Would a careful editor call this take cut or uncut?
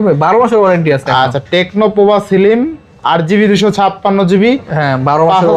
uncut